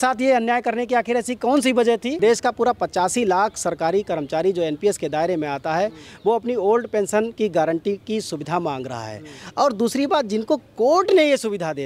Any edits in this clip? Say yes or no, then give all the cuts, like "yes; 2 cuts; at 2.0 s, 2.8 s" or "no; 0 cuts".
yes; 1 cut; at 2.1 s